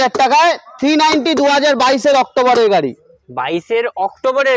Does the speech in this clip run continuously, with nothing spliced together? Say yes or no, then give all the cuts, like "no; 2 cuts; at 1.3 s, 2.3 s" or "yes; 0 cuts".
yes; 0 cuts